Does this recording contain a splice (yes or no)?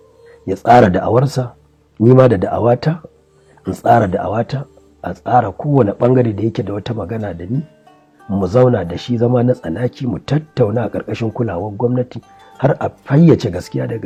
no